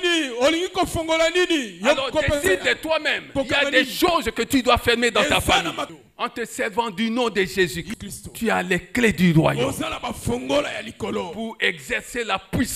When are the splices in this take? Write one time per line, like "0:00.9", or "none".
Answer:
0:03.2
0:05.9
0:07.8